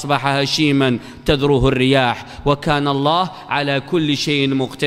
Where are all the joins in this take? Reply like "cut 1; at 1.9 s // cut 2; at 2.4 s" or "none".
none